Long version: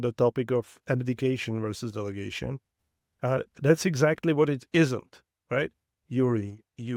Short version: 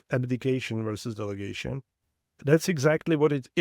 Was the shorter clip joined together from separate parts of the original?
yes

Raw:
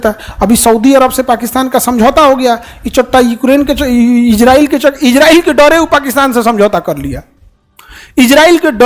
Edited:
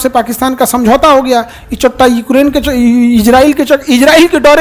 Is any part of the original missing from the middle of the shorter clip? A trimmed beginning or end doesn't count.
no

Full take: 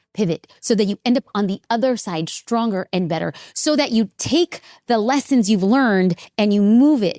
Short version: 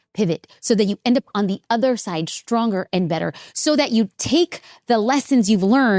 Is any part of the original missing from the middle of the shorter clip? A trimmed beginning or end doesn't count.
no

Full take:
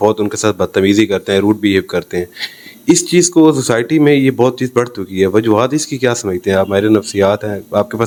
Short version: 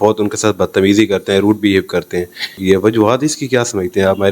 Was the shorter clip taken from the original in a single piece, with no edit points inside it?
no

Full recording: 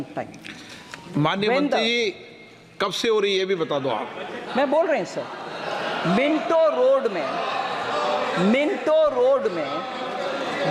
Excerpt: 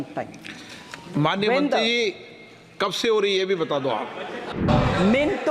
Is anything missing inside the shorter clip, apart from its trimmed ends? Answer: yes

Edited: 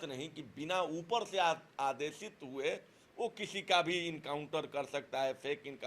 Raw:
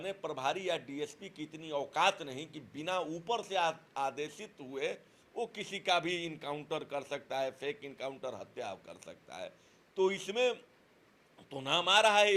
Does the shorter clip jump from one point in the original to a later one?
no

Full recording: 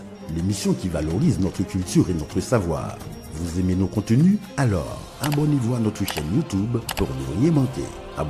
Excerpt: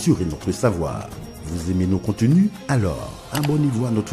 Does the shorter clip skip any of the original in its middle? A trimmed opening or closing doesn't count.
no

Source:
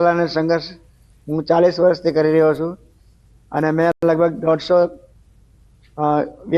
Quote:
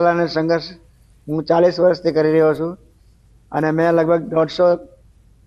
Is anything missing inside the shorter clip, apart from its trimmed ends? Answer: yes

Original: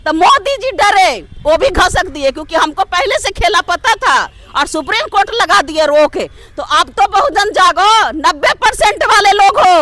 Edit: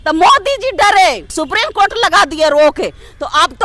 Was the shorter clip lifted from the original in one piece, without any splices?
no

